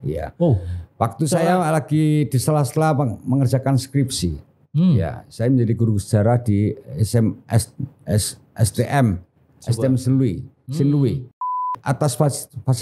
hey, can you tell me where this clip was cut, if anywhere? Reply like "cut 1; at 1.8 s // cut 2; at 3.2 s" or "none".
cut 1; at 11.4 s